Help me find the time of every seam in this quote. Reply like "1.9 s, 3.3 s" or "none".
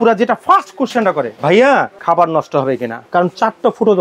1.3 s, 1.9 s, 2.9 s